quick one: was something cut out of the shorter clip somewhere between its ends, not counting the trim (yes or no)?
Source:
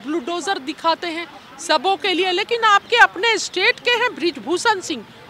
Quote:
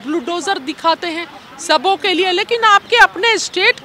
no